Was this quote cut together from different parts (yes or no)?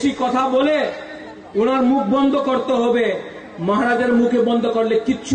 no